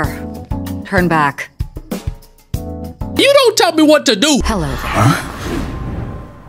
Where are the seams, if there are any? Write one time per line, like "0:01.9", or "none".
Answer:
0:04.4